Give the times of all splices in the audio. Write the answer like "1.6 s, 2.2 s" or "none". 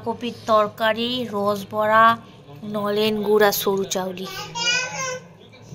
none